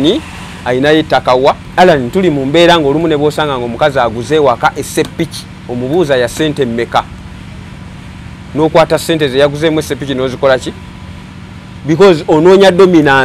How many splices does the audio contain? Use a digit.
1